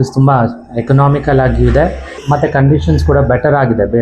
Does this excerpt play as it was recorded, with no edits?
no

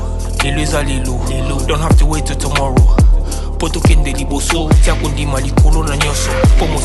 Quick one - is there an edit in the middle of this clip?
no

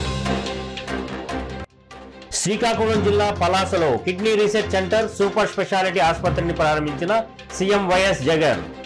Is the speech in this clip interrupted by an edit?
yes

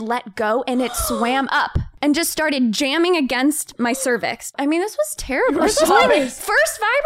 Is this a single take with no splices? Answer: no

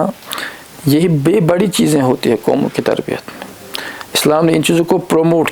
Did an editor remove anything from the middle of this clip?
no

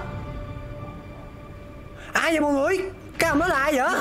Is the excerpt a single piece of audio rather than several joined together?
no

